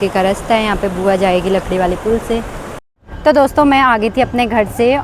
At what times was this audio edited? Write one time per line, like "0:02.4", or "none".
0:02.8